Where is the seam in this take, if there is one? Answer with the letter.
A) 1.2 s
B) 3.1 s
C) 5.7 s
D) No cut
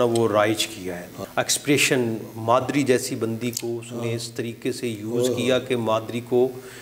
A